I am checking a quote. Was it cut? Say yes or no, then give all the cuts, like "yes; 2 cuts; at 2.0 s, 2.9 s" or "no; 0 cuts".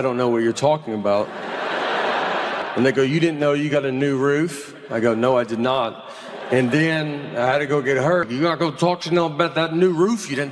yes; 1 cut; at 8.3 s